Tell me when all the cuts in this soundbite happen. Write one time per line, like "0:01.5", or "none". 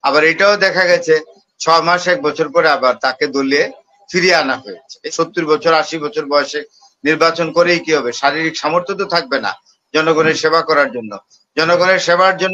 0:05.1